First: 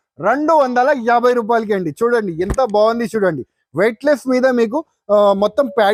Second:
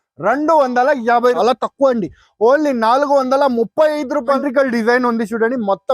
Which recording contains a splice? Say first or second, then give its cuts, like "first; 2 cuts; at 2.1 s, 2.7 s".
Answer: second; 2 cuts; at 1.4 s, 4.4 s